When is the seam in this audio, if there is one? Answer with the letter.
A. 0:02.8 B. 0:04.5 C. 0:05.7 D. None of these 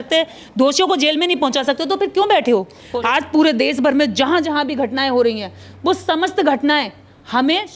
A